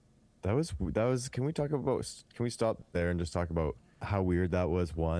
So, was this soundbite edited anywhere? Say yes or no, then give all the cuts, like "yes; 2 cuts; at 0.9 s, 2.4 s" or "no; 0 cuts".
yes; 1 cut; at 3.9 s